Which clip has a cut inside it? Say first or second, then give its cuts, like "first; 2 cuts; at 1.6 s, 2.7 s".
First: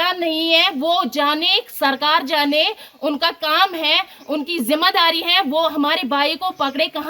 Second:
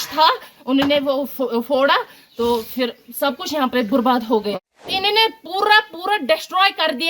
second; 1 cut; at 4.5 s